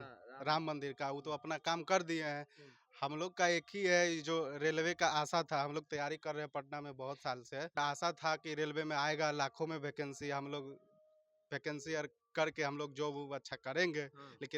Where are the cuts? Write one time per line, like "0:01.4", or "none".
0:07.8